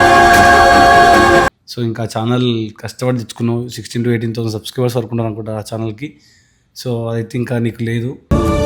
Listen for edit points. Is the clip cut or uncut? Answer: cut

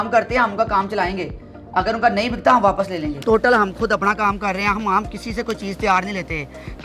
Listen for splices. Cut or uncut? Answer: cut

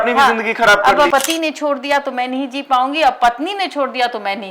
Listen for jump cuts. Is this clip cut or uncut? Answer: cut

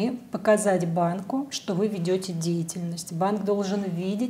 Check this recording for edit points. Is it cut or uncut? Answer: uncut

